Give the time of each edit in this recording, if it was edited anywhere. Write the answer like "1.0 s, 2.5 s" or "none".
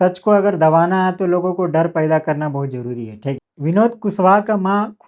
3.6 s